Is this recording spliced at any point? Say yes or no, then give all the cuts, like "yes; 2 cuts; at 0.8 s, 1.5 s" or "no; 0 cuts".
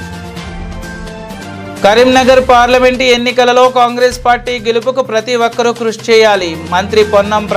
no; 0 cuts